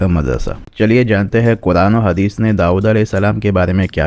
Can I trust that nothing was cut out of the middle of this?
yes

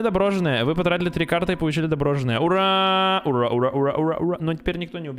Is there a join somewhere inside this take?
no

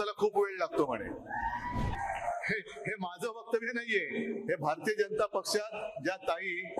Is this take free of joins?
no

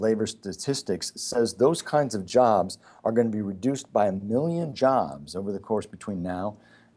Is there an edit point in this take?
no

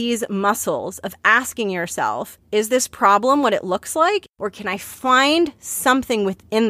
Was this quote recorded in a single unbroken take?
no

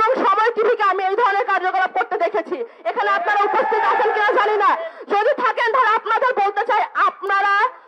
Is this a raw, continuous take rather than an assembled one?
yes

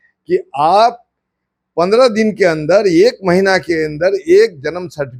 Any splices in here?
no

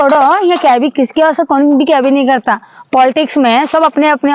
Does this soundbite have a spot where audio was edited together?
no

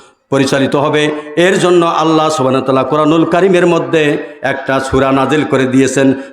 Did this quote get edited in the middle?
no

